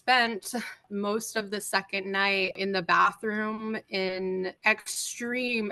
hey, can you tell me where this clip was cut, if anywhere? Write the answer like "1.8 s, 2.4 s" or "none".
0.9 s, 2.6 s, 4.6 s